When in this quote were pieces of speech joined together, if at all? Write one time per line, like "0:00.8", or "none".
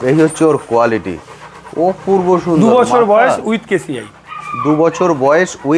none